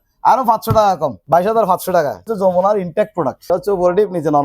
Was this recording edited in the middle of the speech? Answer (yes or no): yes